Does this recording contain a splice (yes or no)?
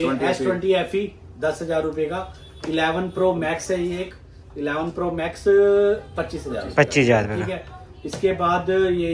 no